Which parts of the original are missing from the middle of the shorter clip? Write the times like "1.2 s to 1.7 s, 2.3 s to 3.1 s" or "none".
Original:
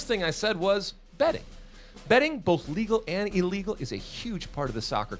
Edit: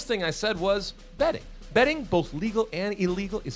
1.5 s to 1.9 s